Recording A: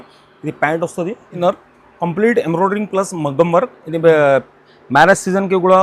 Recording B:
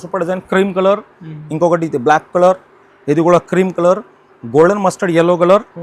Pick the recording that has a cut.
A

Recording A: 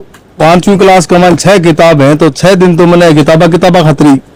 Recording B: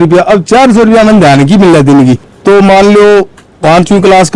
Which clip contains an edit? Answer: B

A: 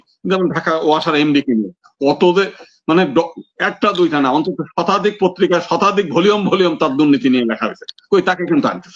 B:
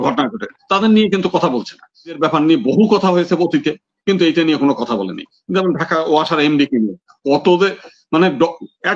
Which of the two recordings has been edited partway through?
B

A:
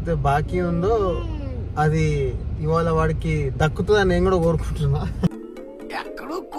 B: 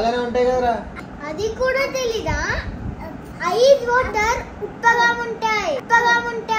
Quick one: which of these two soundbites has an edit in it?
B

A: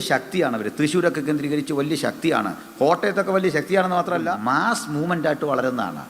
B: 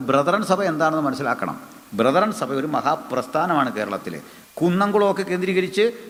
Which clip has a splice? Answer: A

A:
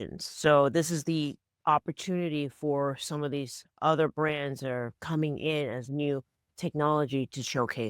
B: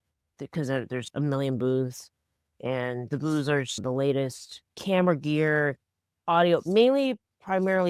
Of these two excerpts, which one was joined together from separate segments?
B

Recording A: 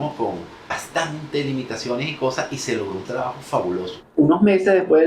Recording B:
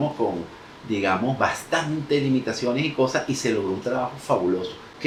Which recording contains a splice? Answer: A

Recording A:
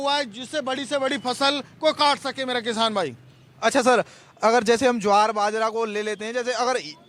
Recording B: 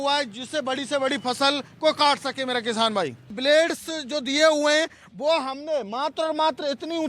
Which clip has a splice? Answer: B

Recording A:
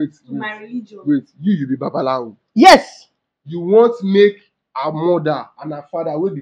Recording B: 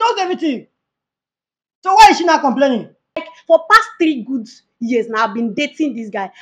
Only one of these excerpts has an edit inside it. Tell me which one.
B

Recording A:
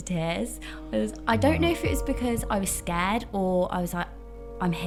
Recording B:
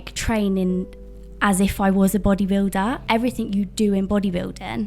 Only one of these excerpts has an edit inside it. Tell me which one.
B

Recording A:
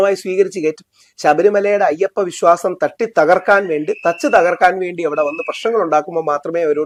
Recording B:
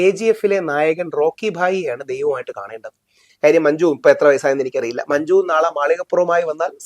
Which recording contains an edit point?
B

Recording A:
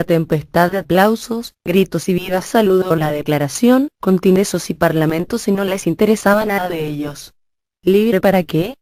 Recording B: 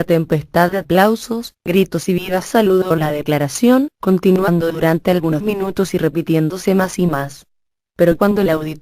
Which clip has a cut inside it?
B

